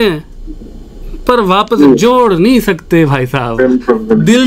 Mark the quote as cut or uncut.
uncut